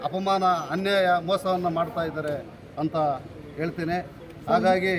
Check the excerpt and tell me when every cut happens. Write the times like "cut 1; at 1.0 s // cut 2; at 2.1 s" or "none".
none